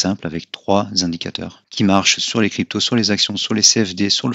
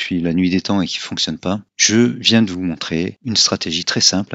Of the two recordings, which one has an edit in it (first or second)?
second